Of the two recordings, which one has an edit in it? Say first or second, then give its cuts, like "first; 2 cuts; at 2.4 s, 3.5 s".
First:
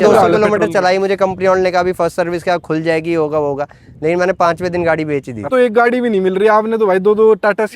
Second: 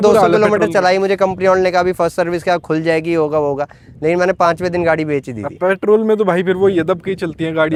first; 1 cut; at 5.5 s